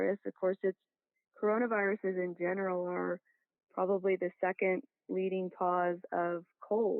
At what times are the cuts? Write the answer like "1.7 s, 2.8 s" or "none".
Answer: none